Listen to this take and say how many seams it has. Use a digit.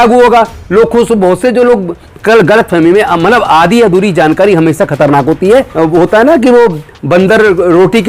1